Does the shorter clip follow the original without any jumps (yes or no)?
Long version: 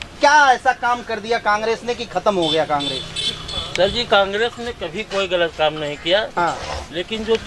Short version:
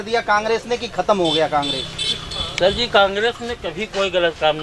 yes